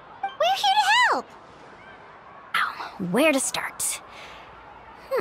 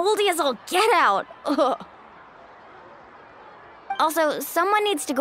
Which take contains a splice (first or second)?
first